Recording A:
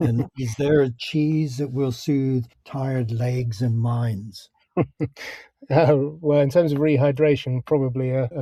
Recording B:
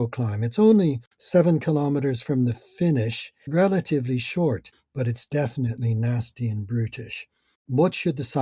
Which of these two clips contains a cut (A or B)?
B